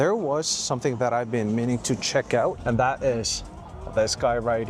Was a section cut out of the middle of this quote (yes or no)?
yes